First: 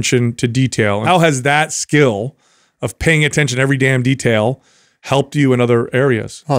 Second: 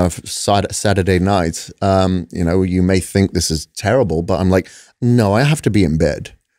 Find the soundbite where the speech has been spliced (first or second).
first